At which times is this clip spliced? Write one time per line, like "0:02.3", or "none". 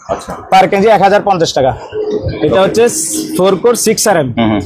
0:01.6